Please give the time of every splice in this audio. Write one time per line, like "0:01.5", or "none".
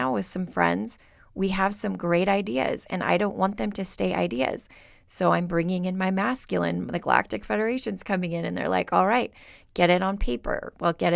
none